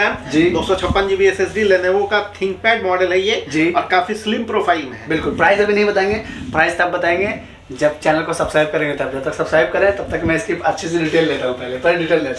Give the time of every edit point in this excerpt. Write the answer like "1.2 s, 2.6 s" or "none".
none